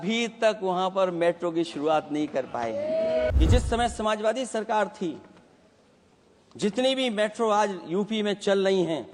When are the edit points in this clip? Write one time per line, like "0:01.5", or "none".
0:03.3